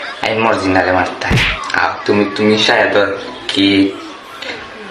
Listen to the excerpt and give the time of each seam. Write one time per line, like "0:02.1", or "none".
none